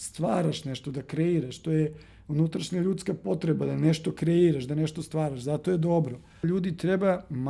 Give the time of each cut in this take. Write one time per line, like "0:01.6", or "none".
0:06.4